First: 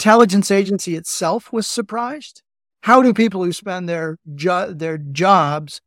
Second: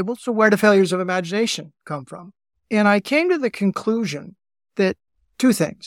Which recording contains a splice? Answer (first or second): first